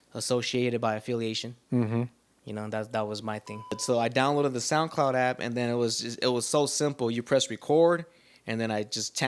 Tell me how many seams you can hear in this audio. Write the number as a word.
one